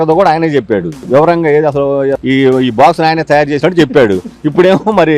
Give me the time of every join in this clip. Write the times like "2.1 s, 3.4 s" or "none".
1.0 s, 2.2 s